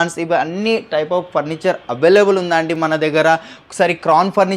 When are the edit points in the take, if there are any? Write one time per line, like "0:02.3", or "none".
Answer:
none